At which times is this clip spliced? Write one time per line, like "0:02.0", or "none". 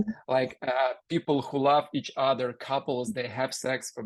none